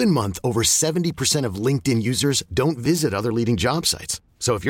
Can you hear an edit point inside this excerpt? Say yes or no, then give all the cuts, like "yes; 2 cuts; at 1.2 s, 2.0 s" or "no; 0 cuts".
no; 0 cuts